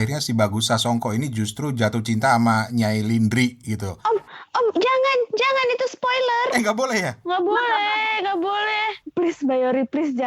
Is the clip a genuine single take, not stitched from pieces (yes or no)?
no